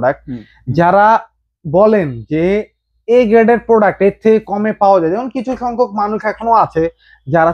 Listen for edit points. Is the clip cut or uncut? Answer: uncut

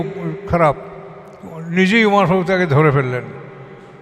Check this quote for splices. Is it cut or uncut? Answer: uncut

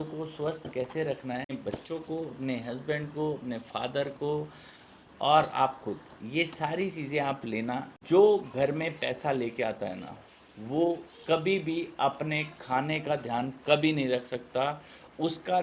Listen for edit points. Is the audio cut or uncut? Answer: cut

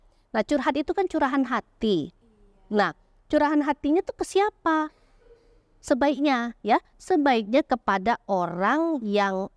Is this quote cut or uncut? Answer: uncut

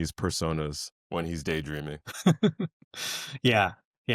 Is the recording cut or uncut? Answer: uncut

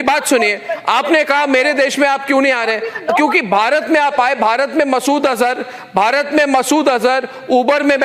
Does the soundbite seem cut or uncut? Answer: uncut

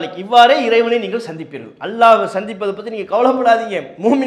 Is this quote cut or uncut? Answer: uncut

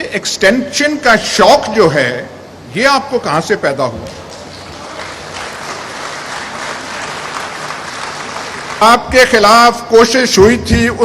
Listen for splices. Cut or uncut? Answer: cut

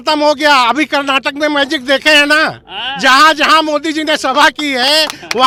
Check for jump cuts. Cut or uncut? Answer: uncut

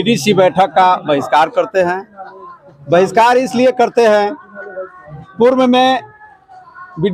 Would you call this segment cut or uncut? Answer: uncut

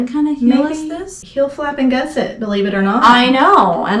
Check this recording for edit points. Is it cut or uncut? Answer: cut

